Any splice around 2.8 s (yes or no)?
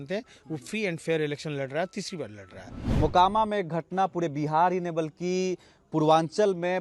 yes